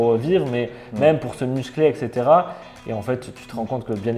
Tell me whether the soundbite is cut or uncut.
uncut